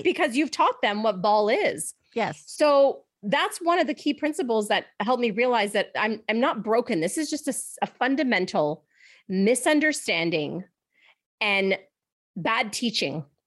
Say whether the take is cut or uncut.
uncut